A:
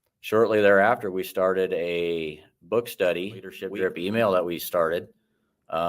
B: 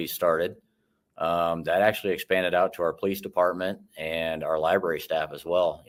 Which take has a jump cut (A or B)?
A